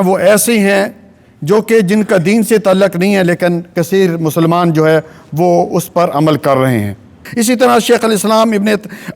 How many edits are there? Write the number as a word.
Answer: one